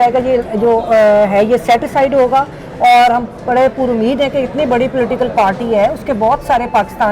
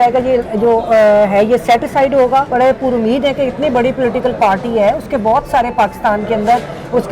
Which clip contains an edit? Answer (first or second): second